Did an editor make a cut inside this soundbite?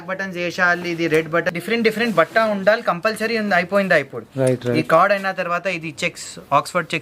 yes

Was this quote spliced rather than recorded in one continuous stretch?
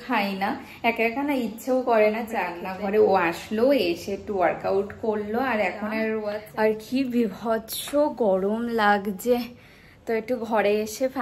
yes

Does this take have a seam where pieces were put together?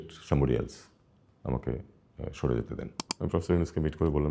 yes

